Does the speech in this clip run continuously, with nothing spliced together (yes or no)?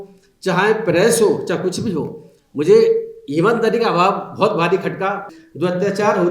no